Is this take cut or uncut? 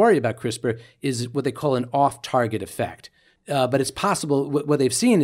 cut